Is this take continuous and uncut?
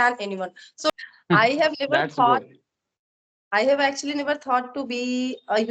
no; 1 cut; at 0.9 s

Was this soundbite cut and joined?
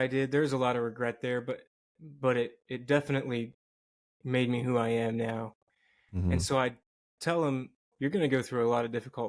yes; 1 cut; at 7.9 s

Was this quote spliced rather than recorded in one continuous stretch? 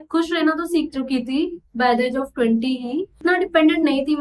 yes; 1 cut; at 3.1 s

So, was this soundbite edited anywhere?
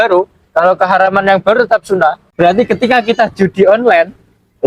yes; 1 cut; at 2.2 s

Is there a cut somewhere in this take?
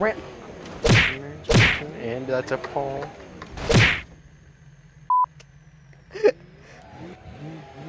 no; 0 cuts

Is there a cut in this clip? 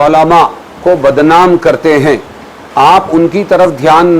no; 0 cuts

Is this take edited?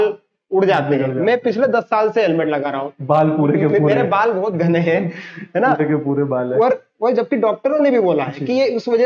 no; 0 cuts

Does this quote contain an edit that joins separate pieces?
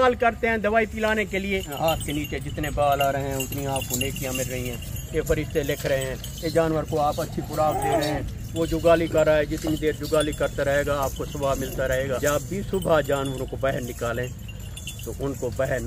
yes; 2 cuts; at 1.7 s, 12.2 s

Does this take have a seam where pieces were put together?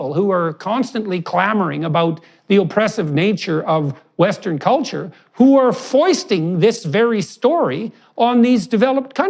no; 0 cuts

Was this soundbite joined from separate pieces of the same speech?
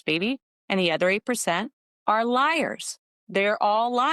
no; 0 cuts

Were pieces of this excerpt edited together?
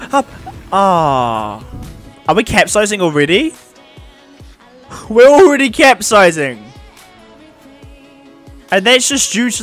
yes; 1 cut; at 2.1 s

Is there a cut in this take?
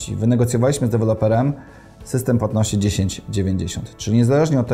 no; 0 cuts

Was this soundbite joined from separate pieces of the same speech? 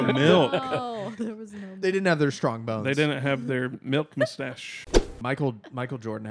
yes; 1 cut; at 4.9 s

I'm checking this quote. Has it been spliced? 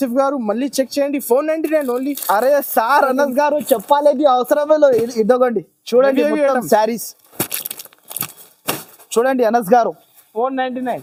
no; 0 cuts

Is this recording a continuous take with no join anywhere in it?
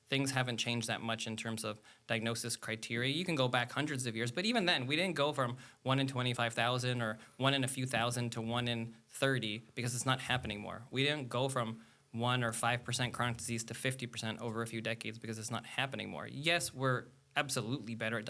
yes; 0 cuts

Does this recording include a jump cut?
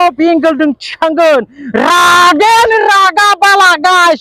no; 0 cuts

